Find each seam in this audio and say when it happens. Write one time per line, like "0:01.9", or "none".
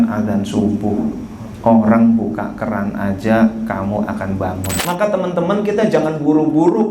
0:04.7